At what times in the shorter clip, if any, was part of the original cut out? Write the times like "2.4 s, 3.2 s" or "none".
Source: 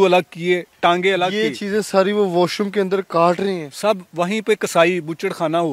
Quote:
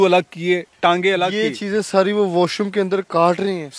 none